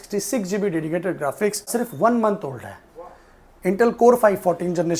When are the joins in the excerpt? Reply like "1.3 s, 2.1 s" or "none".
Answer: 1.7 s